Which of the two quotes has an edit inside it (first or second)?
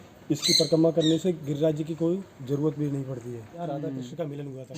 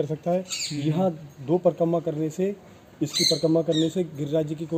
first